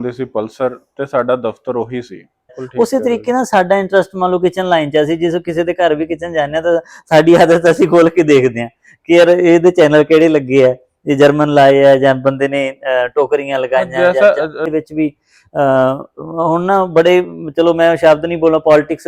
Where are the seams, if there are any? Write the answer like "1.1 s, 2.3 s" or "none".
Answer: 2.6 s, 14.7 s